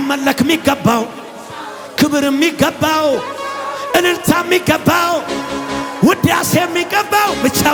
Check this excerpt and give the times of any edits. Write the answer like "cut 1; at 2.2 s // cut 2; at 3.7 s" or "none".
none